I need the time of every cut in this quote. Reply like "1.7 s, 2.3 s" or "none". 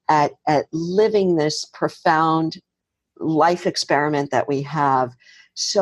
none